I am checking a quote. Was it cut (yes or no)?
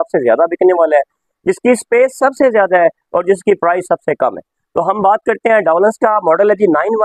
no